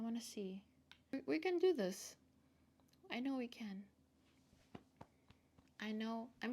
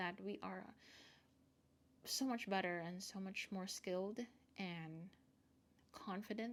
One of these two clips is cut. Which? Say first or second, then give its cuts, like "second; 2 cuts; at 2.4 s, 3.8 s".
first; 1 cut; at 1.1 s